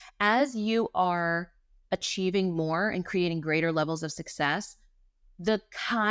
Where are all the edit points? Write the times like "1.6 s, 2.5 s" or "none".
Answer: none